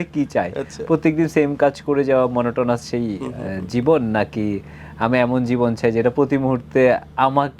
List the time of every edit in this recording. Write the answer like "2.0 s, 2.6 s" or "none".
none